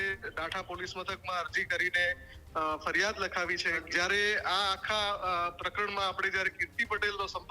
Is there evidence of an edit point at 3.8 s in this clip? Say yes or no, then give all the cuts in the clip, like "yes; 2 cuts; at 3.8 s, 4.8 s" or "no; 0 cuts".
yes; 1 cut; at 3.8 s